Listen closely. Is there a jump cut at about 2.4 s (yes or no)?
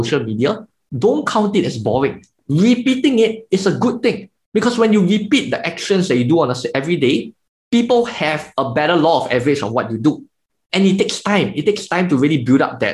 yes